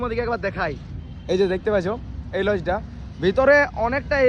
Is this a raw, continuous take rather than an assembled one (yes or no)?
yes